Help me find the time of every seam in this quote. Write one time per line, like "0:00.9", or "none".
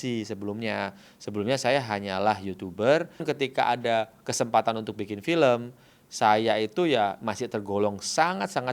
0:03.3